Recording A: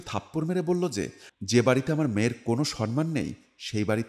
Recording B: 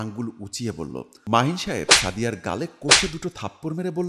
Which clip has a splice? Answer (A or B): B